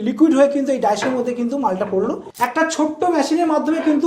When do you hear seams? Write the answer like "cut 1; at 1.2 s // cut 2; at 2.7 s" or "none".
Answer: cut 1; at 2.2 s